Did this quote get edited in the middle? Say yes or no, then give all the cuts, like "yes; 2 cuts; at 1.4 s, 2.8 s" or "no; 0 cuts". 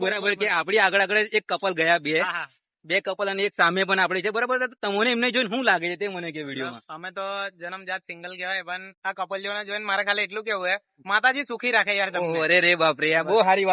no; 0 cuts